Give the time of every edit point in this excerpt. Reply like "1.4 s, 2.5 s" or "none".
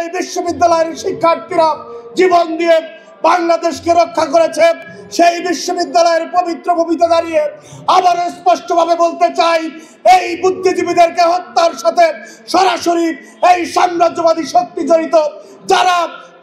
none